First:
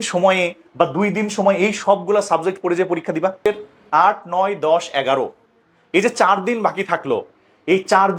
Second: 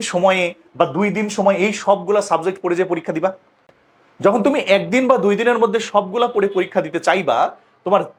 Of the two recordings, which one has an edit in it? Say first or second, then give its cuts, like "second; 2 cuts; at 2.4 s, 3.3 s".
first; 1 cut; at 3.5 s